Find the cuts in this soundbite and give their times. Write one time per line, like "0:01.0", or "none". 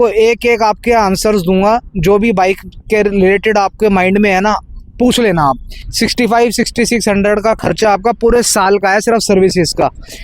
0:05.7